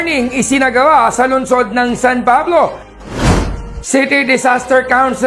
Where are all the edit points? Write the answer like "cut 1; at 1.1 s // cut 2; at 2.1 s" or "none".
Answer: cut 1; at 3.3 s